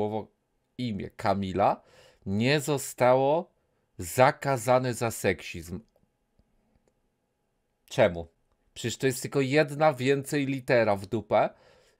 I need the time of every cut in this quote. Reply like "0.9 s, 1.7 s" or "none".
none